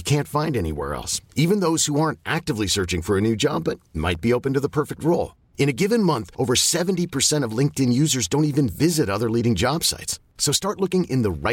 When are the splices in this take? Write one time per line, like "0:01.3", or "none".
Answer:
none